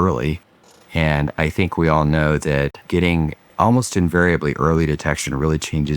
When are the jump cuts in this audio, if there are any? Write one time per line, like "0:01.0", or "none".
0:02.9